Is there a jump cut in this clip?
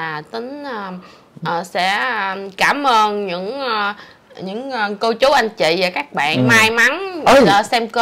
no; 0 cuts

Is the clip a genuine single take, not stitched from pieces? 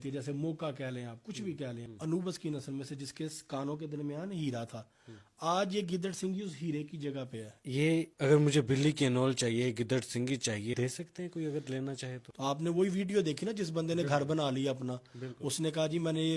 no; 4 cuts; at 1.9 s, 7.7 s, 10.7 s, 12.3 s

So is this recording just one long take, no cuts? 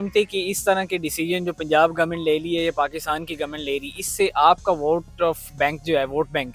yes; 0 cuts

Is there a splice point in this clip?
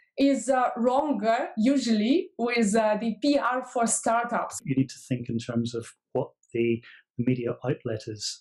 yes; 1 cut; at 4.6 s

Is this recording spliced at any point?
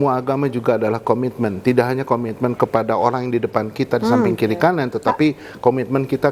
no; 0 cuts

